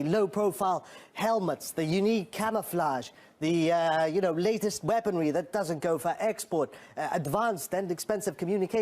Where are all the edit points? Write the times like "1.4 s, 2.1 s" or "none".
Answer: 6.2 s